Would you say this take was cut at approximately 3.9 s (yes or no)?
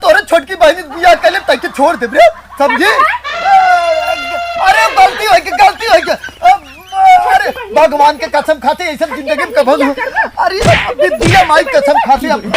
no